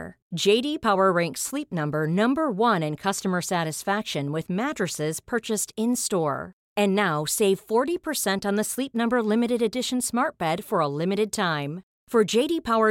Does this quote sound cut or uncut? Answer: uncut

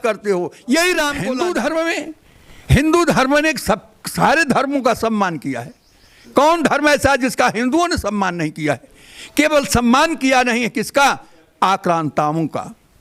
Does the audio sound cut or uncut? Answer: cut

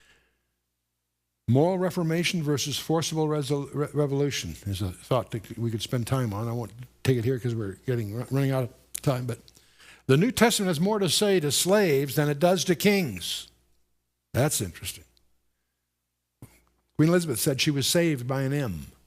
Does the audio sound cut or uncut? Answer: cut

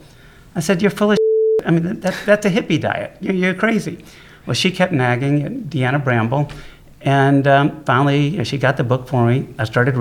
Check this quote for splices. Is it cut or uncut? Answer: uncut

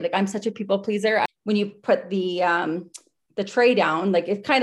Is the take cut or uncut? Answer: cut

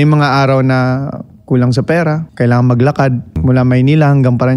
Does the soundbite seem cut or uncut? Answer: cut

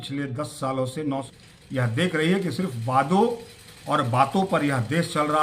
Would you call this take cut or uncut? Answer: cut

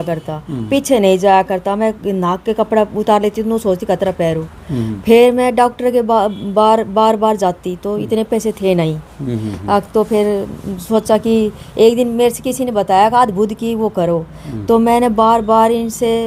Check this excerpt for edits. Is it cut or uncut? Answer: uncut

